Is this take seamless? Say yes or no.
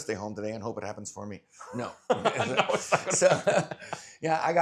yes